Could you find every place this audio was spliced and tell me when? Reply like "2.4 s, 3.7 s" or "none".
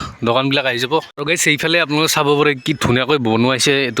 1.1 s